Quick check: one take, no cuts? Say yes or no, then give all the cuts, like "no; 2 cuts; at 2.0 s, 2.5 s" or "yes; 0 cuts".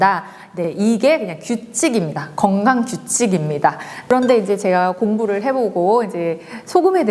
no; 1 cut; at 3.9 s